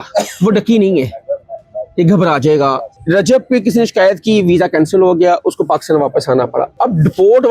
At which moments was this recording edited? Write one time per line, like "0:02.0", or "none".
0:02.9